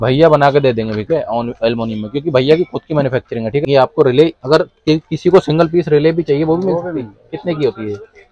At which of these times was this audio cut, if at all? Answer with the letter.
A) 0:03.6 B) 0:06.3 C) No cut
A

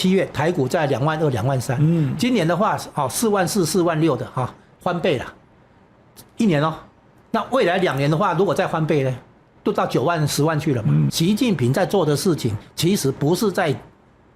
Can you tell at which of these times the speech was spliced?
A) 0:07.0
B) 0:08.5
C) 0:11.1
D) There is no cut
C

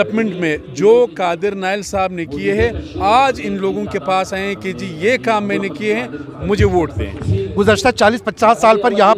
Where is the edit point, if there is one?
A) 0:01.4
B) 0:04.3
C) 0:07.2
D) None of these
C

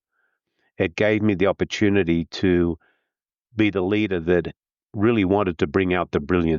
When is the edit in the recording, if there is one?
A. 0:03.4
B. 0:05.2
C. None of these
C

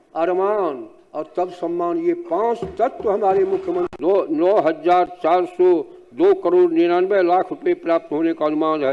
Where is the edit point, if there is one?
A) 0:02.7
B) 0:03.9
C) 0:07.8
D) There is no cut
B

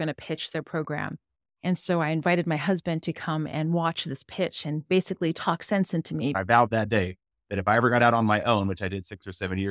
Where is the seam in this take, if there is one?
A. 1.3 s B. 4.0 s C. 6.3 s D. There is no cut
C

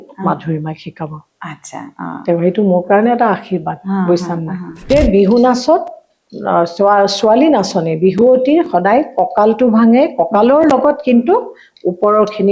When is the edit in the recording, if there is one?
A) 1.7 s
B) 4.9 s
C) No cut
B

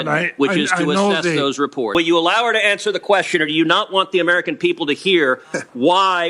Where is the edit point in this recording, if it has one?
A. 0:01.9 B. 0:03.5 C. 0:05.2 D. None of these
A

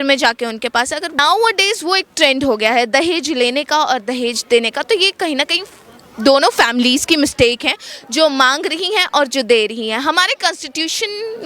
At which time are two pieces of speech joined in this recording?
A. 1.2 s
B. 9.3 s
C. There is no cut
A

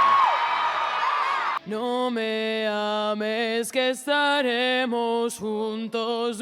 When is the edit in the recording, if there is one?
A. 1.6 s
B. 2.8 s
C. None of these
A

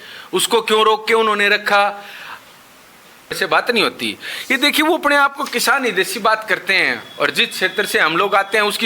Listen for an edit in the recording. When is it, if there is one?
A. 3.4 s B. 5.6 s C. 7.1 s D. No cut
A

